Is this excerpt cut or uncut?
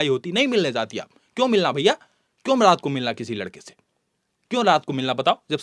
uncut